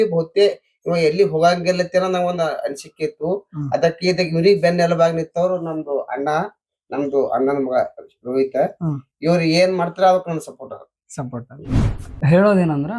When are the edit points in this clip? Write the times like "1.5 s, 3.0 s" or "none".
11.8 s